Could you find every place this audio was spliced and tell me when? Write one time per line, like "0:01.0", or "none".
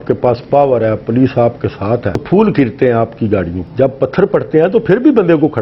none